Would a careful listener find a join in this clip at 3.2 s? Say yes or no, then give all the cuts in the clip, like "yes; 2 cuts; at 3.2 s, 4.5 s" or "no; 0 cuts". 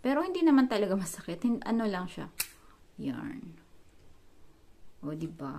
no; 0 cuts